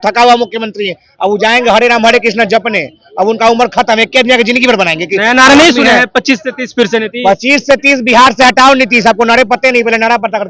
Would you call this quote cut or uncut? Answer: uncut